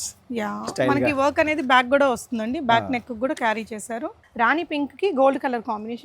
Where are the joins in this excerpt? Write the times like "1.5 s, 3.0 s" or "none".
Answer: 4.2 s